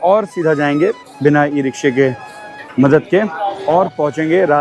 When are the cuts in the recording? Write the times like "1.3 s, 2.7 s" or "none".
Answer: none